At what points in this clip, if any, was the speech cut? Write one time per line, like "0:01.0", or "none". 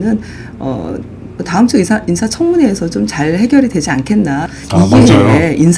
0:04.5